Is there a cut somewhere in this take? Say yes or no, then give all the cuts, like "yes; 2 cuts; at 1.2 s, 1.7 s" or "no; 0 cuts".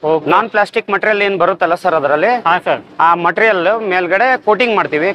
no; 0 cuts